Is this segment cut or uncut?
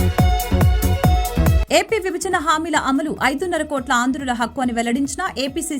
uncut